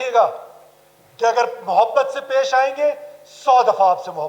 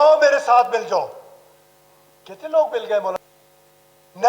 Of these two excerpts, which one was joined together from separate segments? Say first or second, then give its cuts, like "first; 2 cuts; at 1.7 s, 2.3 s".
second; 1 cut; at 3.2 s